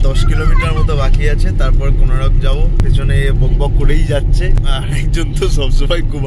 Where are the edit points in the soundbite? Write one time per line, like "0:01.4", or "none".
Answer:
0:02.8
0:04.6